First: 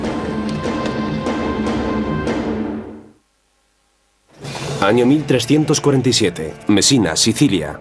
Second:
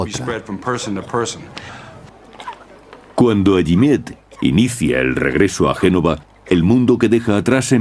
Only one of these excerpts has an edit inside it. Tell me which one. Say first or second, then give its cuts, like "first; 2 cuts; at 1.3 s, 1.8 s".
second; 1 cut; at 1.0 s